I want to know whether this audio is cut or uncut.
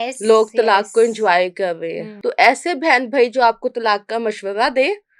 cut